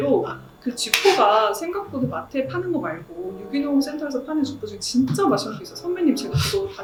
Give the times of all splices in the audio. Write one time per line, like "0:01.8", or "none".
none